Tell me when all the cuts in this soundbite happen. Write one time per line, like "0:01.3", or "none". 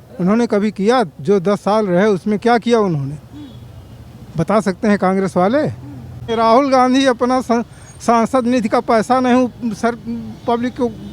0:06.2